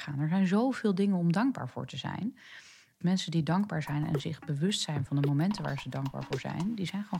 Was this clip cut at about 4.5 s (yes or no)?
no